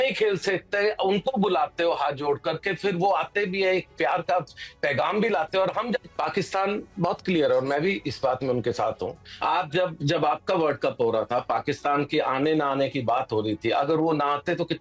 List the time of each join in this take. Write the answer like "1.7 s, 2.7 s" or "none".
6.1 s, 9.3 s